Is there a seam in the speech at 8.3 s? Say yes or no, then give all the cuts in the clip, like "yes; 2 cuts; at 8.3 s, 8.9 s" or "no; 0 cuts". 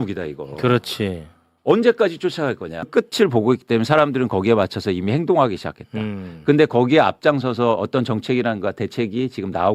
no; 1 cut; at 2.9 s